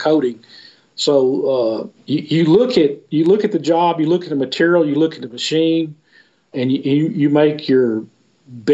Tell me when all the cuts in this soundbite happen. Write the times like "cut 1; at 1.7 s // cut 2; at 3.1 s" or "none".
cut 1; at 1.9 s // cut 2; at 6.5 s